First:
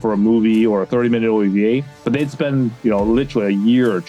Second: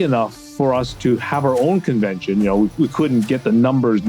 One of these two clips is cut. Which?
second; 1 cut; at 0.9 s

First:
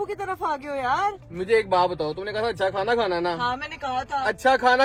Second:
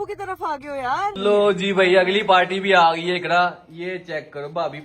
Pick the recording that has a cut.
second; 1 cut; at 1.2 s

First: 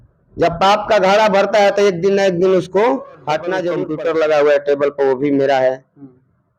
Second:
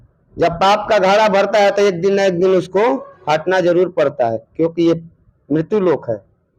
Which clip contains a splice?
first; 1 cut; at 3.8 s

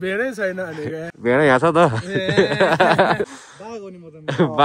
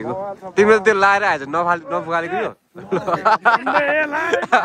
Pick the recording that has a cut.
first; 2 cuts; at 1.1 s, 3.4 s

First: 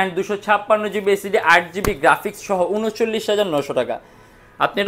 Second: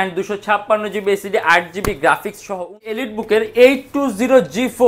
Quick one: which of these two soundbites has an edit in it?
second; 1 cut; at 3.0 s

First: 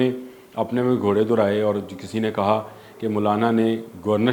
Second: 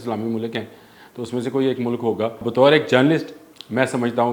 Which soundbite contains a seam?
second; 1 cut; at 2.5 s

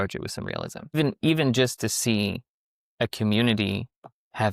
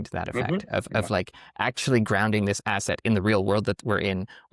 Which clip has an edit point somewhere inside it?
first; 1 cut; at 0.9 s

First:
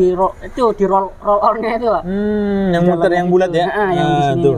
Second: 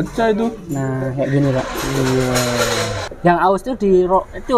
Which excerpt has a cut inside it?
second; 1 cut; at 2.9 s

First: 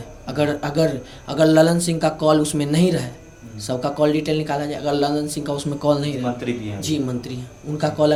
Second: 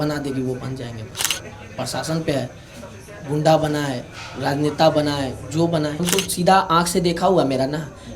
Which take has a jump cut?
second; 1 cut; at 6.0 s

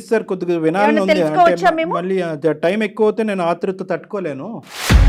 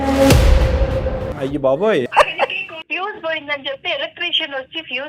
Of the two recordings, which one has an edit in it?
second; 2 cuts; at 1.3 s, 2.8 s

